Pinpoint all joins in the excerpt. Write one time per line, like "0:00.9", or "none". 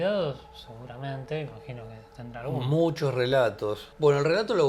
none